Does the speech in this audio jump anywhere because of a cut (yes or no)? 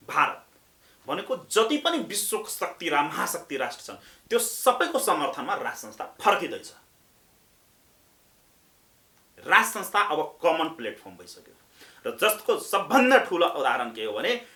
no